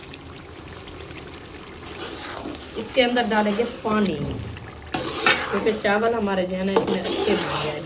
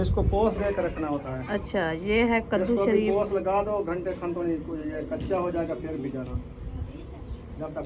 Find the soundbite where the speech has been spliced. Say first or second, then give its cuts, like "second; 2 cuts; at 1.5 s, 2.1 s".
first; 1 cut; at 2.1 s